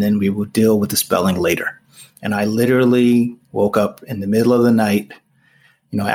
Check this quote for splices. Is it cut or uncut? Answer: uncut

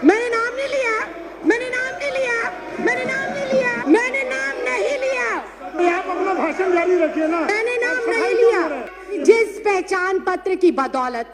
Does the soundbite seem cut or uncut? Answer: cut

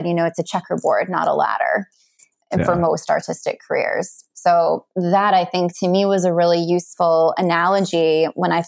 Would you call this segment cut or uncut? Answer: uncut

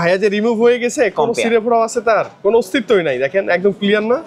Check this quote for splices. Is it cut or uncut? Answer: uncut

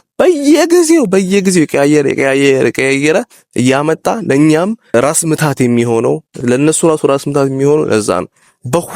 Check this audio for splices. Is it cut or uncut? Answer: cut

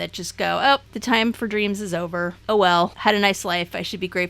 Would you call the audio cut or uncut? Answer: cut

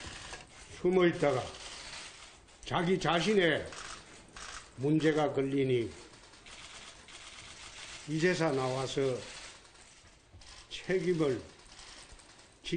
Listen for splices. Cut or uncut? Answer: cut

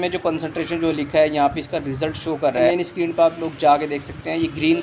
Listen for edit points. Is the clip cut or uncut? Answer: cut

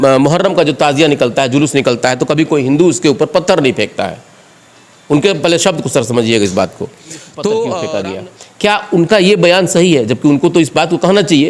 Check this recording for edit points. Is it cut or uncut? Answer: cut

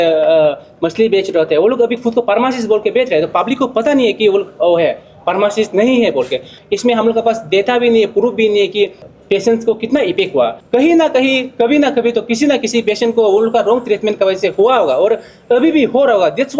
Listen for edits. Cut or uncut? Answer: cut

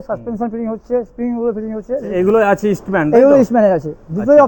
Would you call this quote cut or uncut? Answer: cut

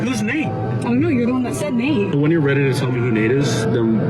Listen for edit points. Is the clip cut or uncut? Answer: cut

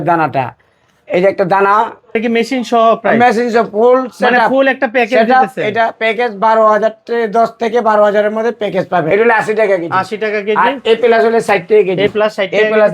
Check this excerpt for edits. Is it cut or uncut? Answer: cut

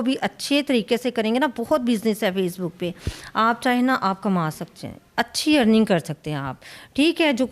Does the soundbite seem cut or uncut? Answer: uncut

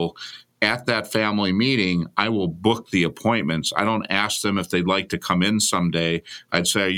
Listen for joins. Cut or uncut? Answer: uncut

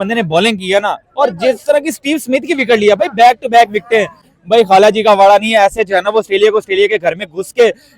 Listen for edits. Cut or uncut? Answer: uncut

